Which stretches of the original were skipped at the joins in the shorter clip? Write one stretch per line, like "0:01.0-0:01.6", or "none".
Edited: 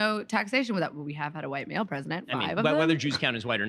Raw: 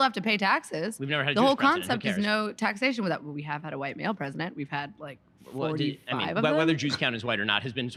0:04.5-0:06.0